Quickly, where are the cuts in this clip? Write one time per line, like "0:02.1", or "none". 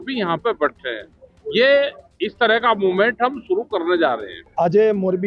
none